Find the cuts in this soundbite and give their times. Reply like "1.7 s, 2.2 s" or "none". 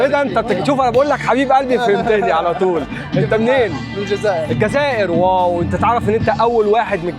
none